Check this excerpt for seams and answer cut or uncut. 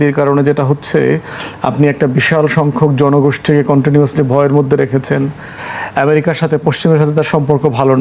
uncut